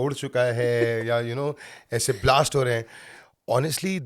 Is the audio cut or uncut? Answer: uncut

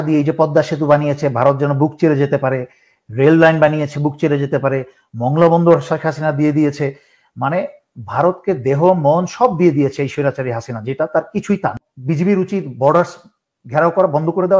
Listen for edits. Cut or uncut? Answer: cut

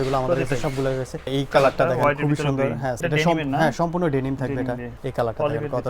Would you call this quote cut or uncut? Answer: cut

